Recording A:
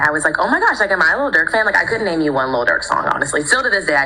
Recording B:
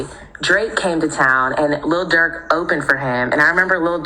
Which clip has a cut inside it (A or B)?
A